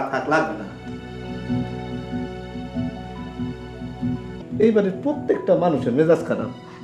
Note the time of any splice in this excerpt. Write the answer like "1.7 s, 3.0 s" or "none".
4.4 s